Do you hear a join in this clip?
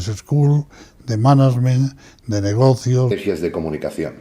no; 0 cuts

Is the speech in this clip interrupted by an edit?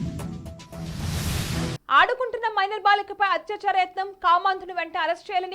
yes; 1 cut; at 1.8 s

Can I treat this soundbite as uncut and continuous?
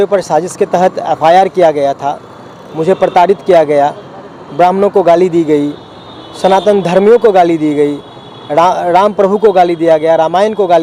yes; 0 cuts

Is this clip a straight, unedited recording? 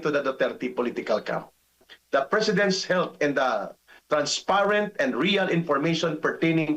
no; 1 cut; at 1.9 s

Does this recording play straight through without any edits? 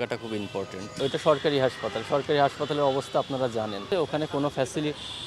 no; 2 cuts; at 0.9 s, 3.8 s

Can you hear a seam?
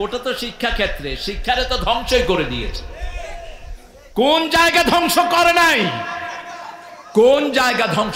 no; 0 cuts

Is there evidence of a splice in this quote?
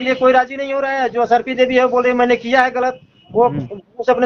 no; 0 cuts

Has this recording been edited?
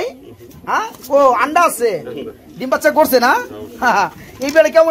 no; 0 cuts

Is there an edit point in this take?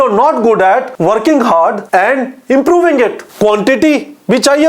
yes; 3 cuts; at 0.9 s, 1.8 s, 3.2 s

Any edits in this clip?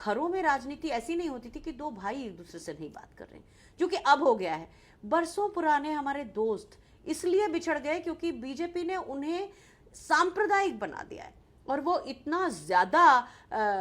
no; 0 cuts

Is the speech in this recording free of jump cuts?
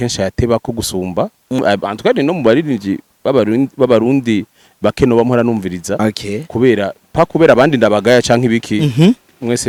yes; 0 cuts

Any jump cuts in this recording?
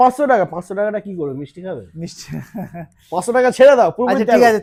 no; 0 cuts

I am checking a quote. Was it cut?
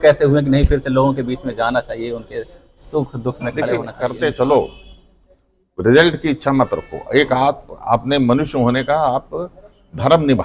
yes; 1 cut; at 3.9 s

